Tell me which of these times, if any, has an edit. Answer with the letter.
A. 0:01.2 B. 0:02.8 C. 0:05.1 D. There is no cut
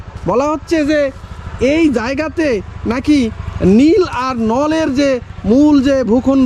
D